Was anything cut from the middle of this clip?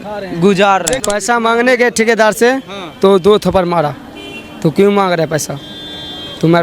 yes; 1 cut; at 1.0 s

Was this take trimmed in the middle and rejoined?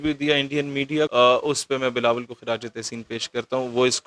yes; 1 cut; at 1.1 s

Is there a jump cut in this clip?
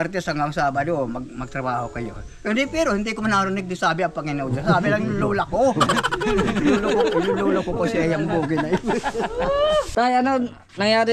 yes; 1 cut; at 9.9 s

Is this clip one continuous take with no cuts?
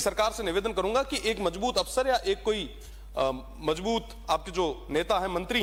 yes; 0 cuts

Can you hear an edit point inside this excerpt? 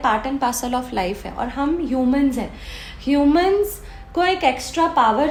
no; 0 cuts

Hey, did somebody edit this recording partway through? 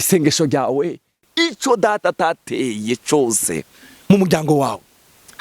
yes; 1 cut; at 1.3 s

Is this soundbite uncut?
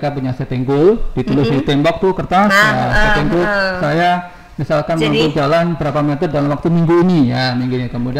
yes; 0 cuts

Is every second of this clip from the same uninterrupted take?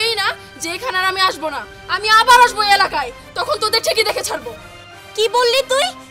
yes; 0 cuts

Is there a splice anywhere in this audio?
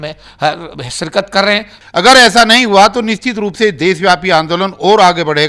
yes; 1 cut; at 1.7 s

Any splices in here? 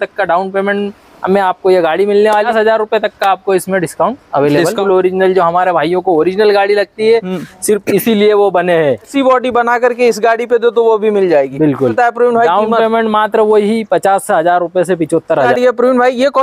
yes; 5 cuts; at 2.5 s, 4.8 s, 9.1 s, 11.9 s, 15.5 s

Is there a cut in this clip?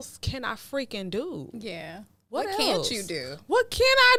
no; 0 cuts

